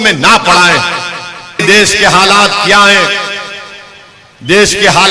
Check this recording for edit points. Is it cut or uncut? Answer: cut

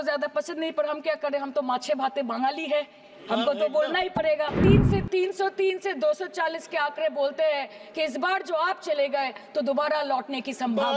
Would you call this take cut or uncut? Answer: cut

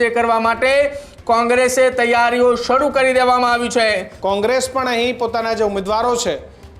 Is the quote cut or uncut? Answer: cut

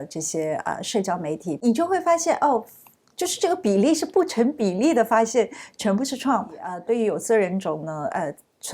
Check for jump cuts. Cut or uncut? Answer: cut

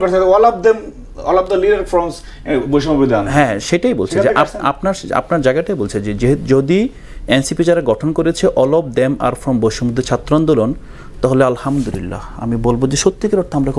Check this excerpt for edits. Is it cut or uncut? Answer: uncut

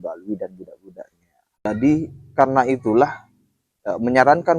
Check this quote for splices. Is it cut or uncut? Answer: cut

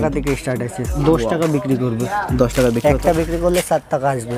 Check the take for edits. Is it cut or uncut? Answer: uncut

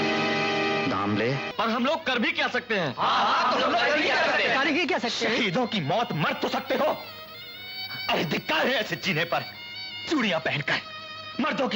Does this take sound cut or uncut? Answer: cut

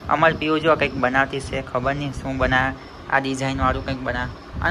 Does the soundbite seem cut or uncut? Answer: uncut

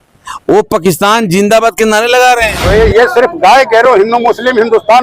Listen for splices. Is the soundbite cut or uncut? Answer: cut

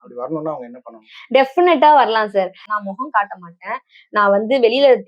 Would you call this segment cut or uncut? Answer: cut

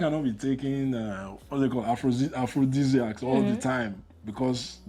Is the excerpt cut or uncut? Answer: uncut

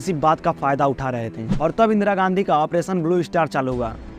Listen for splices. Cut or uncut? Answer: cut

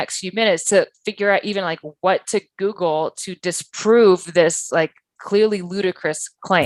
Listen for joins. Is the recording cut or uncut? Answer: uncut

